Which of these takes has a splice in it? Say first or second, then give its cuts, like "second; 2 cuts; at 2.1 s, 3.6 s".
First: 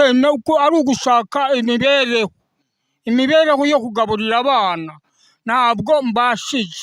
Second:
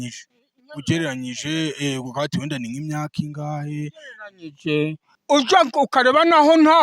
second; 1 cut; at 5.1 s